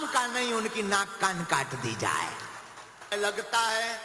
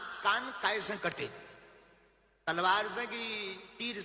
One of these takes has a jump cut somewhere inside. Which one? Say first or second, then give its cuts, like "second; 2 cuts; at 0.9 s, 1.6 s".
first; 1 cut; at 3.1 s